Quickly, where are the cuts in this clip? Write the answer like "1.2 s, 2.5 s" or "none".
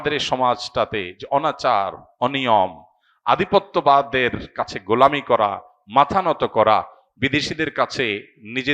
none